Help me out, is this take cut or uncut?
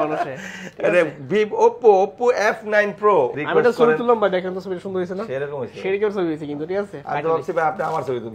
cut